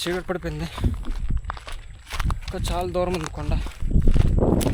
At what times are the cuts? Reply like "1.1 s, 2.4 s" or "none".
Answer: none